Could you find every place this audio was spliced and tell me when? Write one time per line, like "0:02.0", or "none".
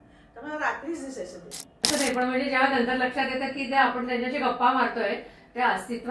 0:01.9